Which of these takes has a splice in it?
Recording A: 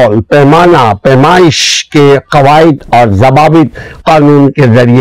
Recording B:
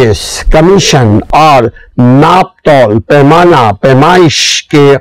B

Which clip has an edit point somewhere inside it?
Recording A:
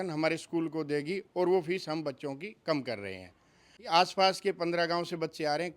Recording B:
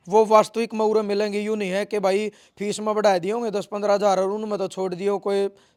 A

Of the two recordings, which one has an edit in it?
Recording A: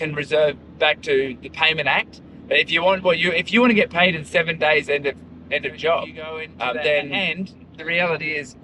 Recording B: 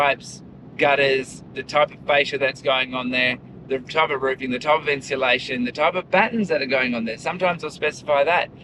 A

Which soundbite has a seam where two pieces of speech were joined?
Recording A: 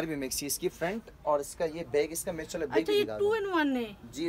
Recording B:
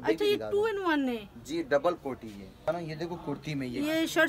B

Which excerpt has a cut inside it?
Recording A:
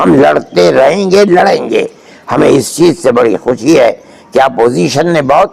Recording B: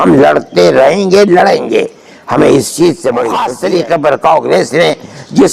B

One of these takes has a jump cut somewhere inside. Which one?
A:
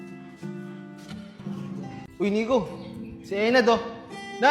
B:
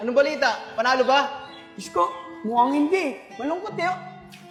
A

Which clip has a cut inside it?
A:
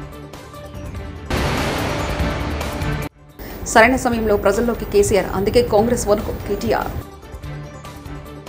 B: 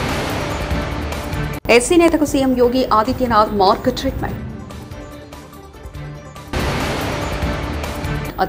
B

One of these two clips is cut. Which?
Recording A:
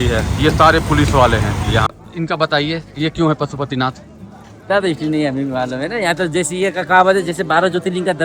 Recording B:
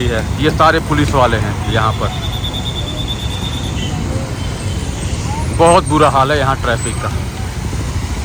A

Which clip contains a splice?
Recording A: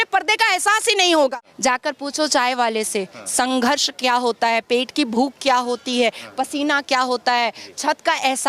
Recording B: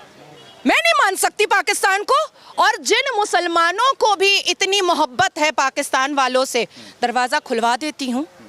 A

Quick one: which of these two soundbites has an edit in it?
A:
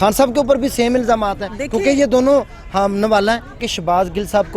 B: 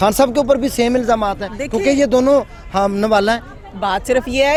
A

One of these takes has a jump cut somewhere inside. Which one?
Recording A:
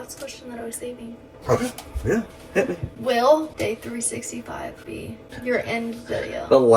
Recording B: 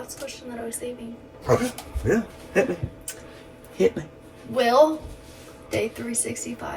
A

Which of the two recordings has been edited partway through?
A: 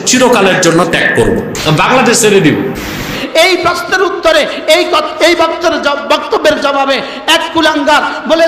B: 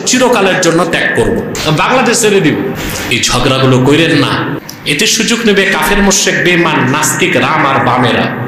A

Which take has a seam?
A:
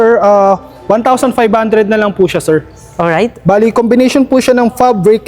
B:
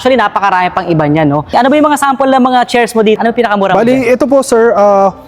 B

